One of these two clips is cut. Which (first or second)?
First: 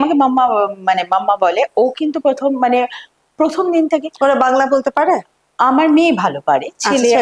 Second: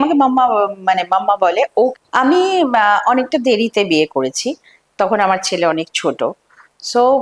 second